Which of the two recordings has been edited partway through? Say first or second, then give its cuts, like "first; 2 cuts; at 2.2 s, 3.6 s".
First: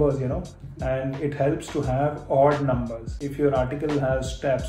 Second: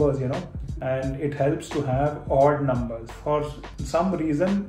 first; 1 cut; at 3.1 s